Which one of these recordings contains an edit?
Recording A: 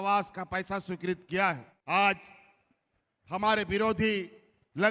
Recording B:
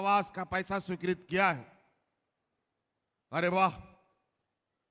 A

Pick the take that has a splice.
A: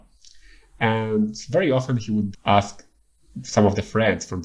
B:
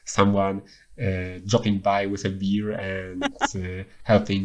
A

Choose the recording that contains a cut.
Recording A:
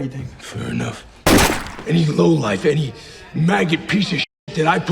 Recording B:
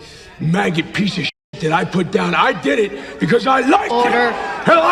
A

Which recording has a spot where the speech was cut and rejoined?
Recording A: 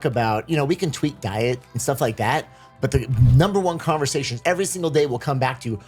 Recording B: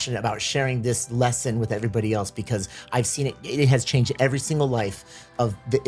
A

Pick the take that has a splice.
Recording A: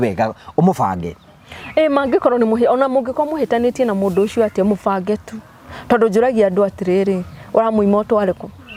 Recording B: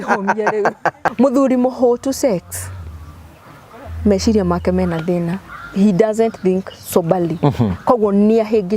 B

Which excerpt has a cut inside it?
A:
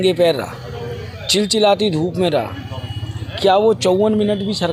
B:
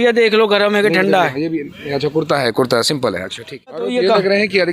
B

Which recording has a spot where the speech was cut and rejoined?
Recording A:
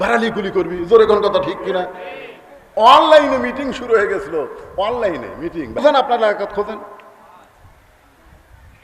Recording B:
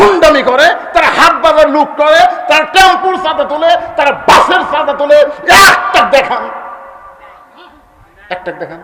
A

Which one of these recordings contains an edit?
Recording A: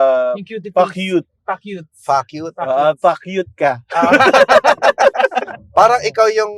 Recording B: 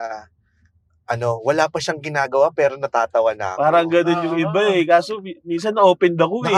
A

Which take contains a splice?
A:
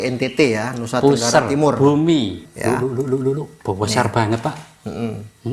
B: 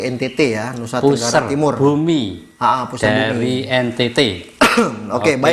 A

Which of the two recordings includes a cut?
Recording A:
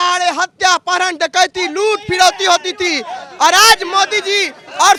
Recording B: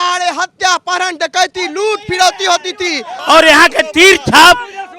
B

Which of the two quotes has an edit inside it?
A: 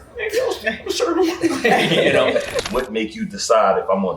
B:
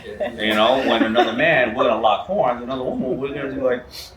A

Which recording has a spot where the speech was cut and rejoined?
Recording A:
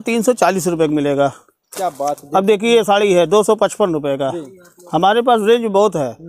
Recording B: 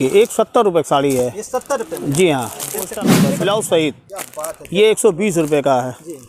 B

